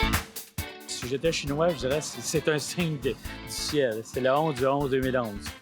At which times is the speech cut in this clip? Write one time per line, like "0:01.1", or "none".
0:00.9

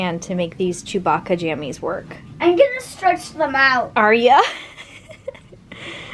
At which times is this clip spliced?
none

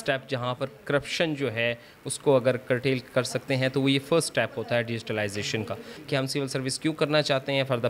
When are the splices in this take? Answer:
0:05.9

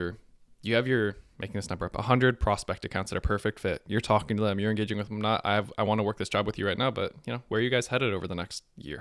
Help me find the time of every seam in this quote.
none

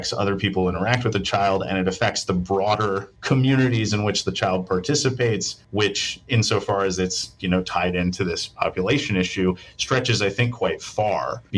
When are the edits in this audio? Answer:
none

